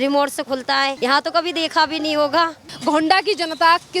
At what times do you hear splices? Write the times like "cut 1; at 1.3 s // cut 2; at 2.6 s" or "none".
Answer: cut 1; at 0.9 s // cut 2; at 2.7 s